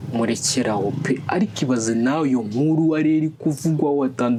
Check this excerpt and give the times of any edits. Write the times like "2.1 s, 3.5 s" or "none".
none